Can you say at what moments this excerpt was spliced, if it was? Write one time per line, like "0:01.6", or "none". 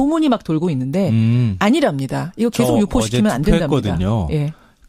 none